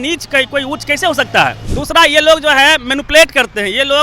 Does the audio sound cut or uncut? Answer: cut